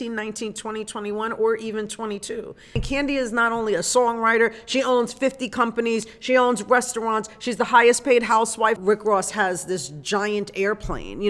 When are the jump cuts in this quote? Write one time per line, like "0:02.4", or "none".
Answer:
0:02.8
0:08.8